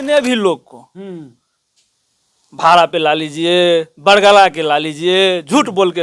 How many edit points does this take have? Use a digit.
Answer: 0